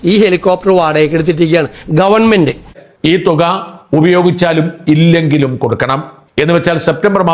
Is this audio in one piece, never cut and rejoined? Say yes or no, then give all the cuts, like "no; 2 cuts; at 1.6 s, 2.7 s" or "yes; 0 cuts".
no; 1 cut; at 2.8 s